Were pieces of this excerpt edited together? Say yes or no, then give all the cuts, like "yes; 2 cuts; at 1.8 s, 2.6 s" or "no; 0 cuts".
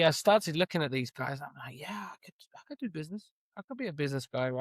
no; 0 cuts